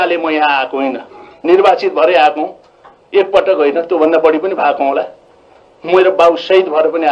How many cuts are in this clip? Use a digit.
0